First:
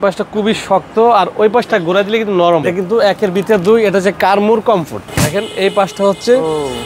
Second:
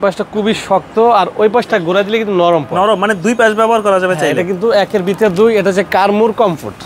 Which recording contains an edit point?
first; 2 cuts; at 2.7 s, 5.0 s

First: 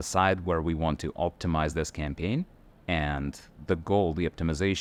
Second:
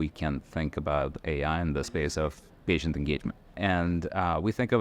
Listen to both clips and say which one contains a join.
second; 2 cuts; at 2.0 s, 3.4 s

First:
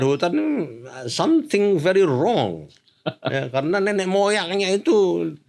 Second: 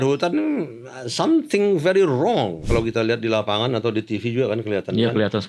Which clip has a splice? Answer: second; 1 cut; at 2.6 s

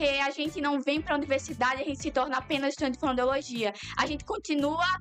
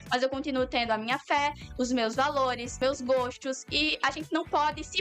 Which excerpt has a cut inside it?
second; 1 cut; at 2.8 s

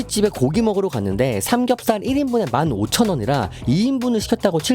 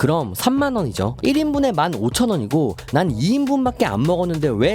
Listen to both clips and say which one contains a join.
second; 1 cut; at 1.2 s

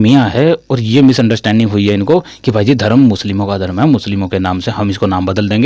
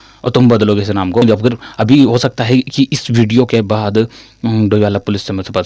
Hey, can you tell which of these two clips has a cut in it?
second; 1 cut; at 1.2 s

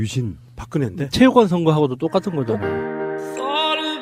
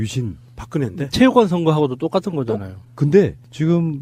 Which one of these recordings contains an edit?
first; 1 cut; at 2.4 s

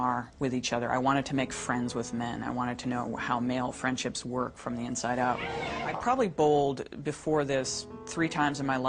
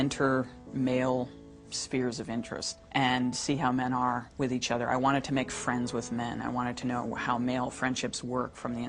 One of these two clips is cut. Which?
first; 1 cut; at 5.9 s

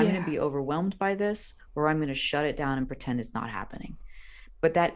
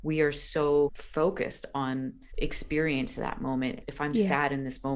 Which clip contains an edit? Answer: second; 3 cuts; at 1.0 s, 2.2 s, 3.8 s

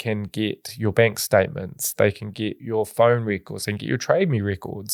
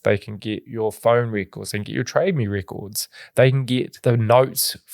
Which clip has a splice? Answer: second; 1 cut; at 3.9 s

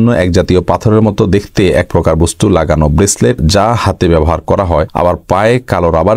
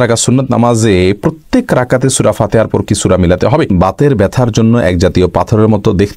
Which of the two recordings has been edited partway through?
second; 1 cut; at 3.7 s

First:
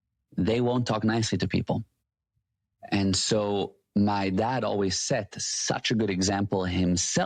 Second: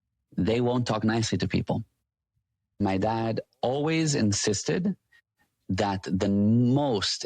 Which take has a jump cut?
second; 1 cut; at 2.8 s

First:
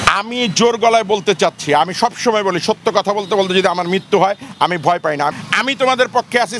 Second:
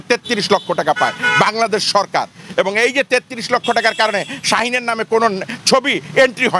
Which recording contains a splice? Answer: first; 1 cut; at 5.4 s

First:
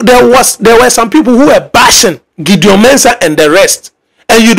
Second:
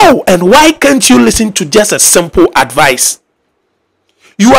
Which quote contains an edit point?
first; 1 cut; at 2.3 s

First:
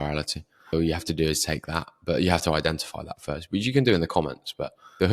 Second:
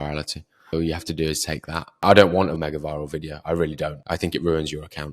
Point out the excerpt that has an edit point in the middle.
second; 2 cuts; at 1.9 s, 2.6 s

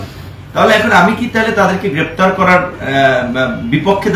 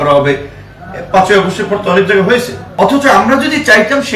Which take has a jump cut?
second; 1 cut; at 2.6 s

